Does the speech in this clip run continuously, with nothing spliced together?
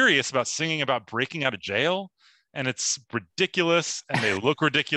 yes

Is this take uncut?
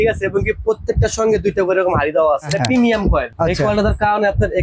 no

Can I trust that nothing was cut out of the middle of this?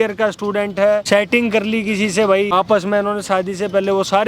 no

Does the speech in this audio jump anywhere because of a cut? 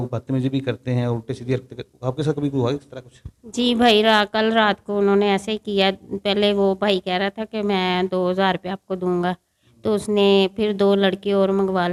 no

